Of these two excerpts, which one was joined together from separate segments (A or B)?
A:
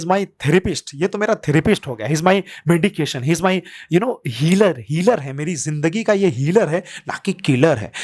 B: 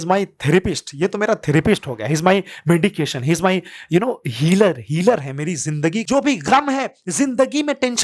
B